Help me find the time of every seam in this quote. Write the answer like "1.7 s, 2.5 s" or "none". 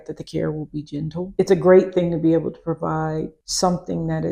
1.2 s